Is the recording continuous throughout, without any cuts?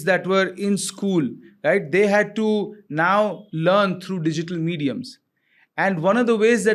yes; 0 cuts

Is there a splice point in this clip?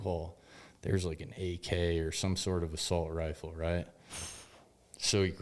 no; 0 cuts

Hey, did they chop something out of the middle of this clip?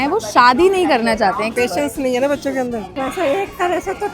yes; 1 cut; at 1.5 s

